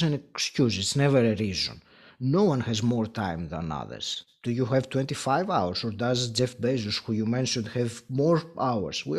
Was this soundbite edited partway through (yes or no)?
no